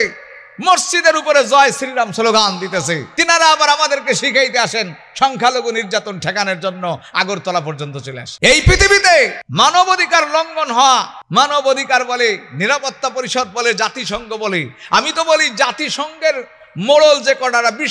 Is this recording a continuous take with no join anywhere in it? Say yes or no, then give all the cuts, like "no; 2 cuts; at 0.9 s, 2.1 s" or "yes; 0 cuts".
no; 4 cuts; at 3.1 s, 8.2 s, 9.4 s, 11.2 s